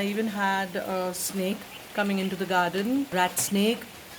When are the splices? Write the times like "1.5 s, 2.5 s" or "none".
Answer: 3.1 s